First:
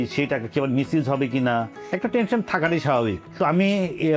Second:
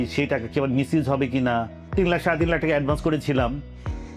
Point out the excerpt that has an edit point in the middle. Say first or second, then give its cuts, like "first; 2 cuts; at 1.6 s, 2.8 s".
second; 1 cut; at 1.8 s